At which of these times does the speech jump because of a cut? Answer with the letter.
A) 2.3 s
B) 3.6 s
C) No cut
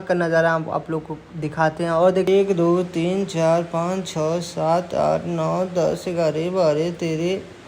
A